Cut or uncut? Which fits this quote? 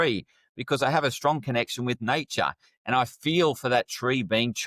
uncut